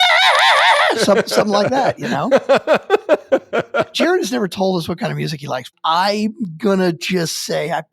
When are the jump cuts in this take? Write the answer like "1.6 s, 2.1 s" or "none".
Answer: 1.8 s, 3.9 s, 5.7 s